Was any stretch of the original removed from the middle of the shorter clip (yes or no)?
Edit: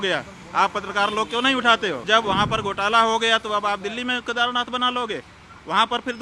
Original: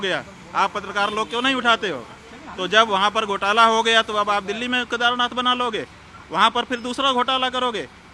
yes